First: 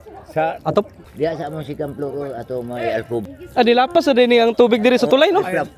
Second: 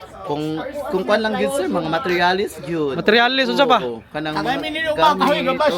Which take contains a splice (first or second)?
first